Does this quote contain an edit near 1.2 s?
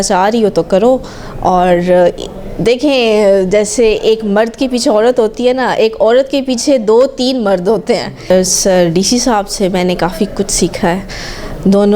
no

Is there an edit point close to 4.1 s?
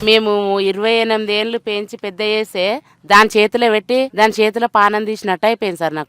yes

